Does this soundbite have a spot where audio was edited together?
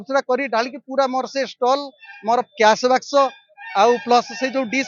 no; 0 cuts

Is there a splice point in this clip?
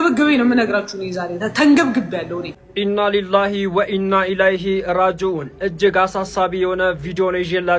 yes; 1 cut; at 2.6 s

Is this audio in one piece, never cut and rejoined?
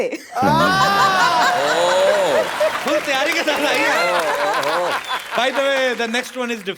yes; 0 cuts

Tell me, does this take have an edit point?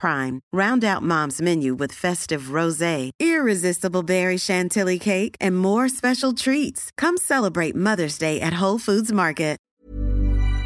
yes; 1 cut; at 9.6 s

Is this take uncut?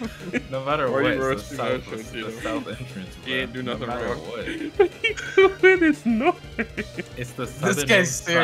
yes; 0 cuts

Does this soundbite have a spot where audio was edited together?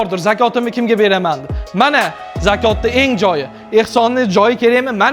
no; 0 cuts

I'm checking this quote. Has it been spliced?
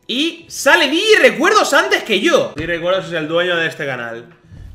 yes; 1 cut; at 2.5 s

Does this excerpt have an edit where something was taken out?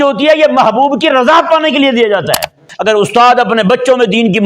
yes; 1 cut; at 2.7 s

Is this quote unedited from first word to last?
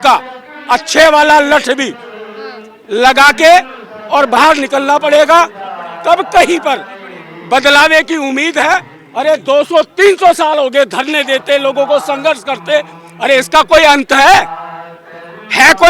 no; 1 cut; at 9.0 s

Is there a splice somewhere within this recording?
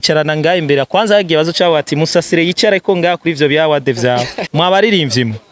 yes; 1 cut; at 4.4 s

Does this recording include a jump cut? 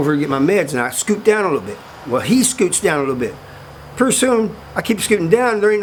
no; 0 cuts

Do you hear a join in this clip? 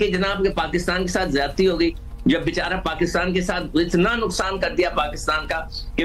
no; 0 cuts

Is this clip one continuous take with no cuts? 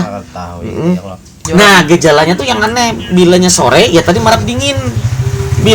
no; 1 cut; at 1.5 s

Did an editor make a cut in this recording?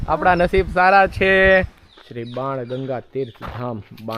yes; 1 cut; at 1.8 s

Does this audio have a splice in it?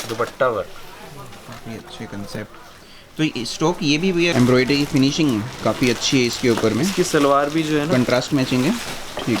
yes; 1 cut; at 4.3 s

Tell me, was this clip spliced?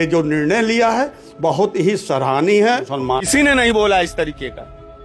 yes; 1 cut; at 3.2 s

